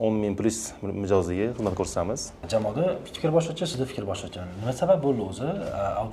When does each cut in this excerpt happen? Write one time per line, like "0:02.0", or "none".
0:02.5